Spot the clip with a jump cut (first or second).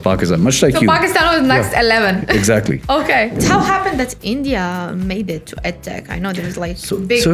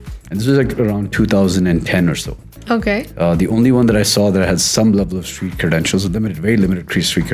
first